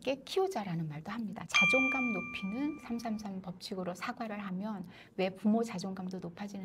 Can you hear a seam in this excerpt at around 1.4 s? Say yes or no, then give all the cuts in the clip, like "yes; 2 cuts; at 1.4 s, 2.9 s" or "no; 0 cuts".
yes; 1 cut; at 1.4 s